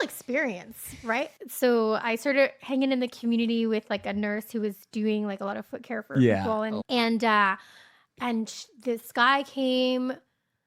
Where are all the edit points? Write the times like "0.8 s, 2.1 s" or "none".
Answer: 1.3 s, 6.8 s